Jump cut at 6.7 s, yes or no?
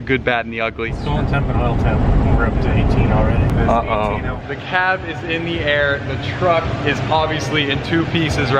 no